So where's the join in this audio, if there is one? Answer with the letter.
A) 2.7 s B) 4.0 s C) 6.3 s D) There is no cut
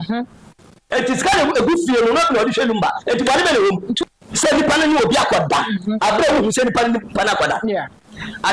B